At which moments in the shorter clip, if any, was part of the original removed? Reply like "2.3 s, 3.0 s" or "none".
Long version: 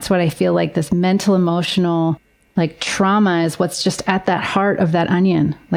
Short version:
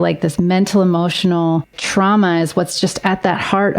1.8 s